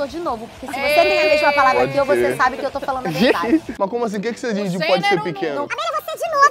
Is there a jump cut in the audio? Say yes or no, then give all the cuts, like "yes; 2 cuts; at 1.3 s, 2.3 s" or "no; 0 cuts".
yes; 1 cut; at 3.7 s